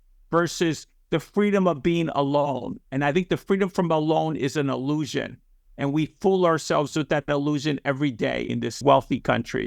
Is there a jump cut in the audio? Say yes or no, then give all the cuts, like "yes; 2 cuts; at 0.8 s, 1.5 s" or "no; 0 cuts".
yes; 1 cut; at 8.8 s